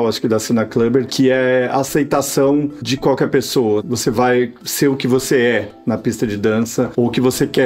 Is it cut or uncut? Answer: uncut